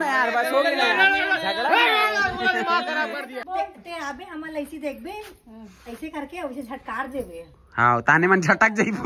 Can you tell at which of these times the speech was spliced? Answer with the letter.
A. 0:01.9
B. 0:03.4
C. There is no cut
B